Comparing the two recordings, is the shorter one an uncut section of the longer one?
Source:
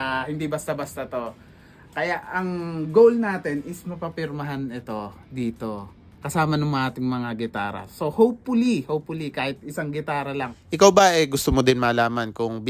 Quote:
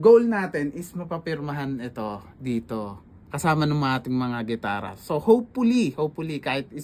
yes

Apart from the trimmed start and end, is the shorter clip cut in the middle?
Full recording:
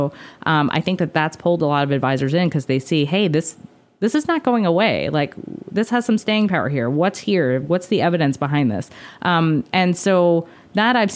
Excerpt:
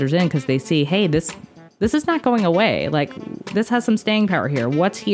no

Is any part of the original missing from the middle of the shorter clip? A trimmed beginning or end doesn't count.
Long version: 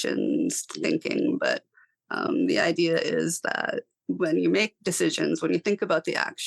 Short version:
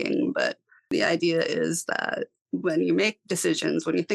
yes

